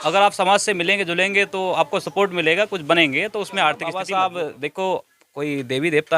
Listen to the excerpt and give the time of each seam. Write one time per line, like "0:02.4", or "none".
0:03.9